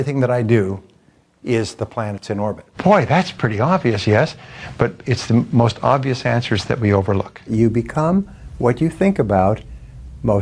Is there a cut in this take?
yes; 2 cuts; at 2.6 s, 7.5 s

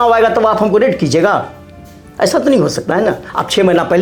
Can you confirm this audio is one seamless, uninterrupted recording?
yes; 0 cuts

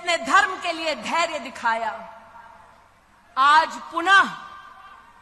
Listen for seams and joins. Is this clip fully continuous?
yes; 0 cuts

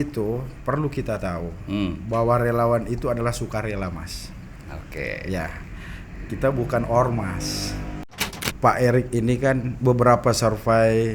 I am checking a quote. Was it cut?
yes; 1 cut; at 8.2 s

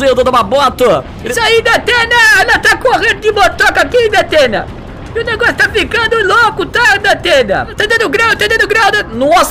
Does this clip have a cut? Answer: yes; 2 cuts; at 1.2 s, 7.7 s

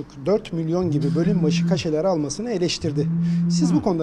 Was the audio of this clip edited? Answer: no; 0 cuts

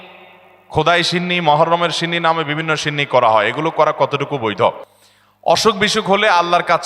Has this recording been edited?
no; 0 cuts

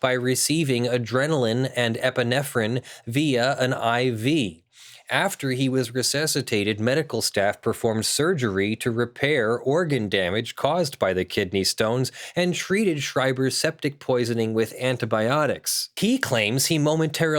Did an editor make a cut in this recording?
yes; 1 cut; at 15.9 s

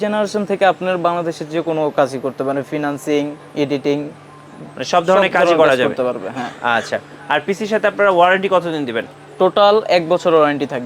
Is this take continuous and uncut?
yes; 0 cuts

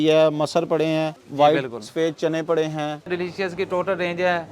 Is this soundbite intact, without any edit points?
no; 2 cuts; at 1.2 s, 3.1 s

